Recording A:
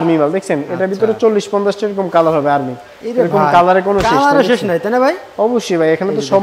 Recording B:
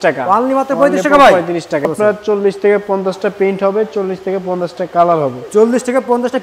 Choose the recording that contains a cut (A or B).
B